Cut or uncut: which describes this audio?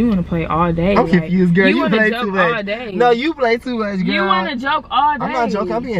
uncut